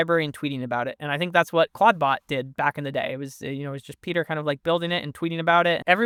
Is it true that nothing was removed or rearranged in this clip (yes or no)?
yes